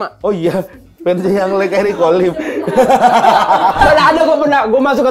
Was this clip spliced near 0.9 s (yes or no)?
no